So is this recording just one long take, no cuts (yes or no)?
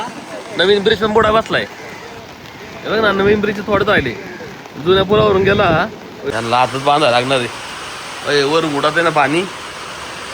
no